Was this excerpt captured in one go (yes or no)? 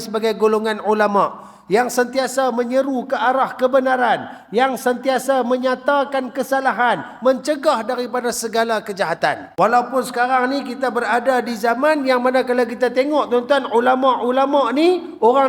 no